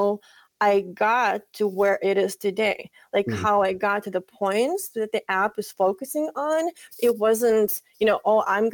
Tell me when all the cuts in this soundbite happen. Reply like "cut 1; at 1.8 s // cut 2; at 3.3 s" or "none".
none